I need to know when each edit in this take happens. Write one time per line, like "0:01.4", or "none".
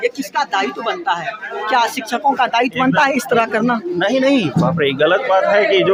none